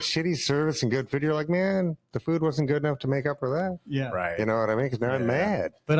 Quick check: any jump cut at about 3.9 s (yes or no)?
no